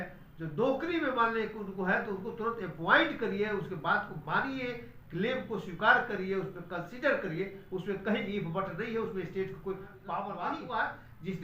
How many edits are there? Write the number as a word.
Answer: one